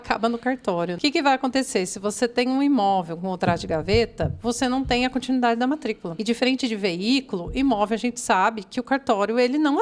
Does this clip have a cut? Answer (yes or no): yes